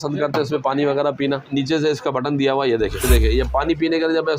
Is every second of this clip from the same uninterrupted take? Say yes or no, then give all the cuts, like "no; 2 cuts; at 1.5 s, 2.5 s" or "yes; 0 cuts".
no; 2 cuts; at 1.4 s, 3.1 s